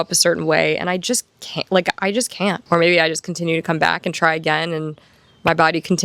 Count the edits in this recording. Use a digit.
1